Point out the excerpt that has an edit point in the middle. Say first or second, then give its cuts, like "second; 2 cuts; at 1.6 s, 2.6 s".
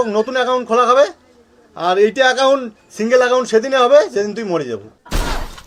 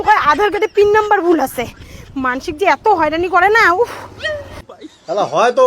second; 1 cut; at 4.6 s